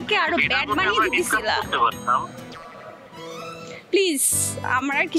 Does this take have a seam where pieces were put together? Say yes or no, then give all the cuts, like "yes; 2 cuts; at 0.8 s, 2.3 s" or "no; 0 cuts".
no; 0 cuts